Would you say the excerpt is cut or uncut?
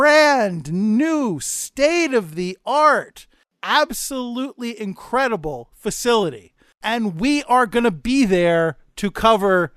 cut